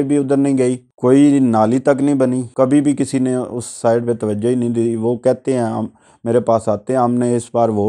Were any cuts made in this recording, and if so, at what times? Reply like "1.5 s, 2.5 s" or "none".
0.9 s, 2.5 s